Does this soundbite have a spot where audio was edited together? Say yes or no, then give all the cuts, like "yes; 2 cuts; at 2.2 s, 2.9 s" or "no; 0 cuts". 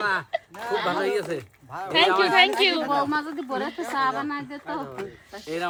no; 0 cuts